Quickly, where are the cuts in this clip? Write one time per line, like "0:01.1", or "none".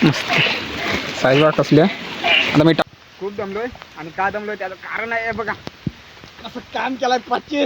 0:02.8

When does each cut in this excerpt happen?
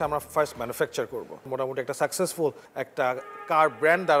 0:01.5
0:02.7

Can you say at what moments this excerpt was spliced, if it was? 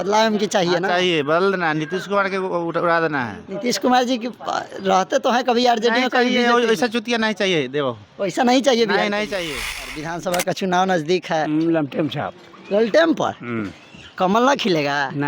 0:10.1

